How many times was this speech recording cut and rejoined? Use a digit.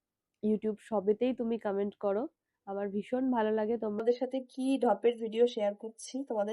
1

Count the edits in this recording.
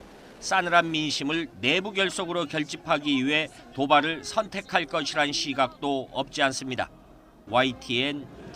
1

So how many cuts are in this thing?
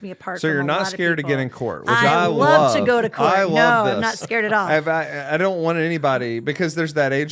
0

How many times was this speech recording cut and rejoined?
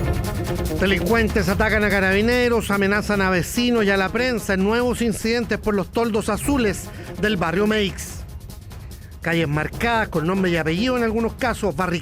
1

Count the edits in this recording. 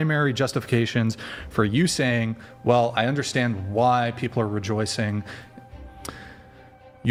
0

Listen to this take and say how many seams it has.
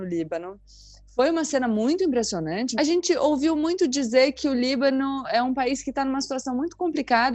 1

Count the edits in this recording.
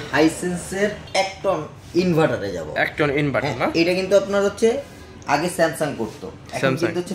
1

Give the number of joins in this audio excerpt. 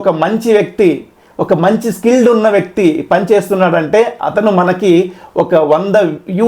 0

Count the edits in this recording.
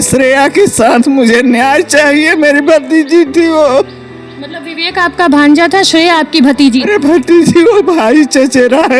0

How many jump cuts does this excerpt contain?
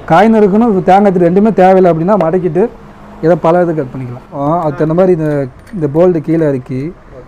1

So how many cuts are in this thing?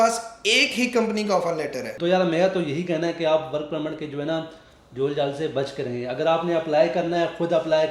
1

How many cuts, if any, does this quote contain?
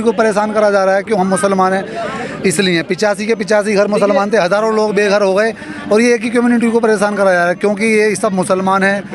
0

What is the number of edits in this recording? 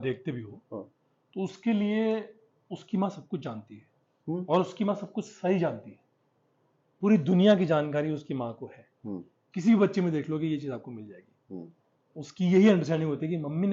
0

